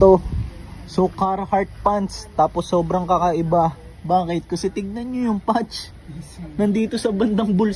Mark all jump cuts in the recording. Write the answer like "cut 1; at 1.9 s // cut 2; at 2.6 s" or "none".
none

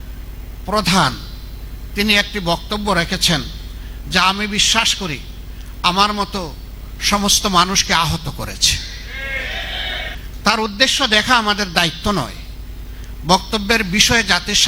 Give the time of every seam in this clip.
cut 1; at 10.2 s

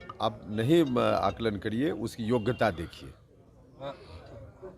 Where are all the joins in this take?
none

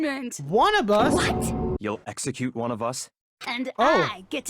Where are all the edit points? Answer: cut 1; at 1.8 s

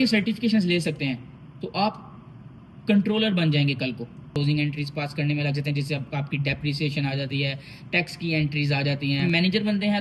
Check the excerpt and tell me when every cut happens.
cut 1; at 4.3 s // cut 2; at 9.2 s

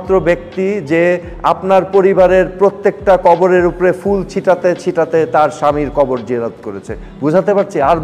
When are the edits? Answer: none

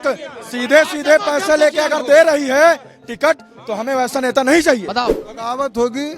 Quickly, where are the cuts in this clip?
cut 1; at 5.0 s

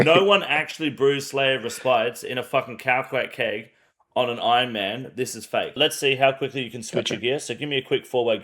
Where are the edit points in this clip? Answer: cut 1; at 5.8 s

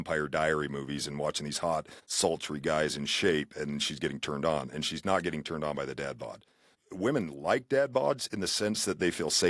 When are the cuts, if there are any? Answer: cut 1; at 2.0 s // cut 2; at 6.8 s

